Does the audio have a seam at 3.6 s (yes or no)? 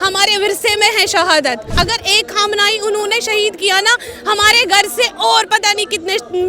no